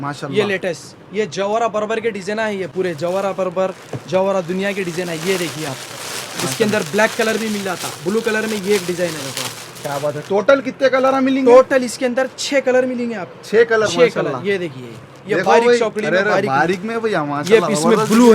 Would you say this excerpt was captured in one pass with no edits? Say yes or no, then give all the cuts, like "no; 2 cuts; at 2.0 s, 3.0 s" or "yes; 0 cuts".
yes; 0 cuts